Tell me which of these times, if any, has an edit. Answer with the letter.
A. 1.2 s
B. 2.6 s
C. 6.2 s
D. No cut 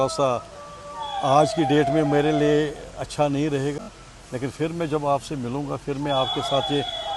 D